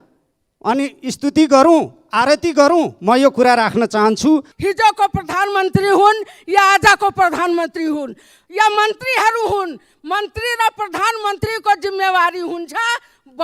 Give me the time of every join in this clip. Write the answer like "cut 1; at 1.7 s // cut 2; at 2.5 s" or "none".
cut 1; at 4.5 s

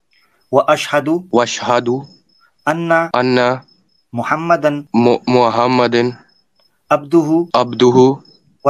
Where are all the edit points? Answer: cut 1; at 1.2 s // cut 2; at 3.1 s // cut 3; at 4.8 s // cut 4; at 7.5 s

